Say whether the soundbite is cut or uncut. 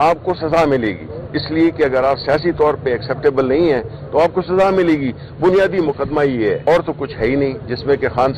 cut